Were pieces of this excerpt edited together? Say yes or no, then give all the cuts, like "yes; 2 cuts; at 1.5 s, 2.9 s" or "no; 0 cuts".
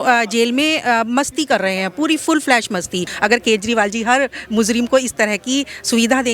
yes; 1 cut; at 3.1 s